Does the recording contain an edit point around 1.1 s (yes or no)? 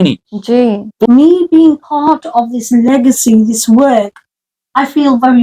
yes